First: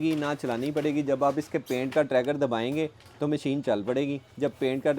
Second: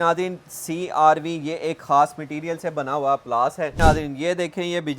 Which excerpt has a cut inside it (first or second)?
second